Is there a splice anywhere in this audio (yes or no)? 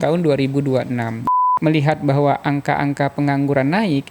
yes